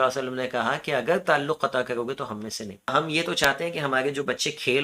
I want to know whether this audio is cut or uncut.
cut